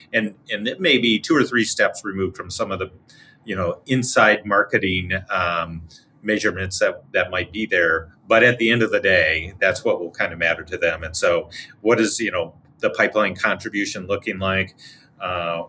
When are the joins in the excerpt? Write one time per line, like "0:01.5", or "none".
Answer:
none